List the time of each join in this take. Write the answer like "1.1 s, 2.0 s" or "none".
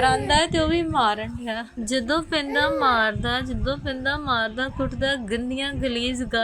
1.7 s